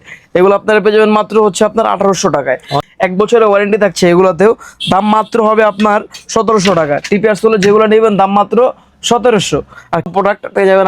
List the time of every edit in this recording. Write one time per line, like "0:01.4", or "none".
0:02.7
0:10.1